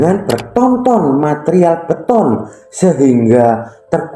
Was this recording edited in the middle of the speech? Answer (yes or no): no